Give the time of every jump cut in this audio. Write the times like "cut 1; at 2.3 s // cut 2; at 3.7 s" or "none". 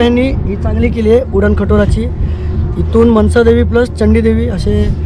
none